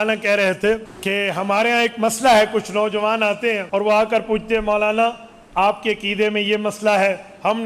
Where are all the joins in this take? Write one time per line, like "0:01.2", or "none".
0:00.9
0:03.6

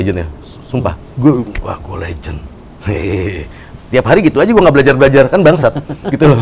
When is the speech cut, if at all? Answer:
0:01.0

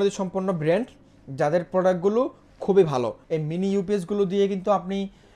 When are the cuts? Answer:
0:03.2

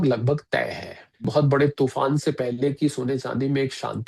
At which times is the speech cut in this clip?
0:01.3

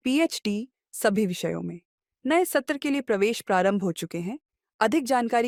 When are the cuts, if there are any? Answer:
none

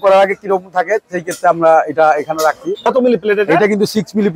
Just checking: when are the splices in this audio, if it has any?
0:02.9

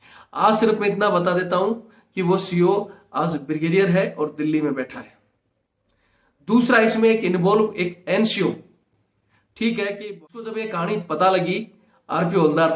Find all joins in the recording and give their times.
0:10.5

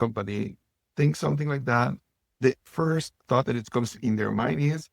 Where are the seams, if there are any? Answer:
0:04.0

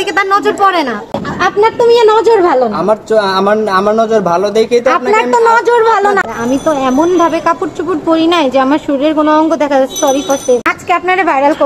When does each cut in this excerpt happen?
0:01.2
0:06.2
0:10.7

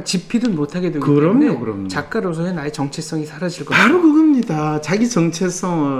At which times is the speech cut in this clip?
none

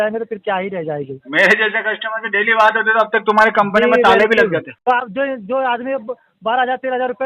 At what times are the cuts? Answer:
0:04.7

